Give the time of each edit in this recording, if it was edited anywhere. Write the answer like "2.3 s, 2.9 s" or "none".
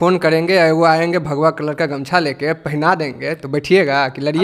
none